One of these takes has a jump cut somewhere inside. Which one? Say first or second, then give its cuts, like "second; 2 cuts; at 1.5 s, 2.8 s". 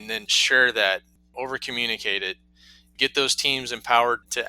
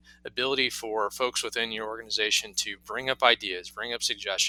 first; 1 cut; at 1.3 s